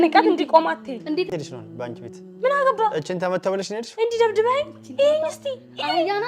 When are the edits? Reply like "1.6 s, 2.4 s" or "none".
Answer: 1.3 s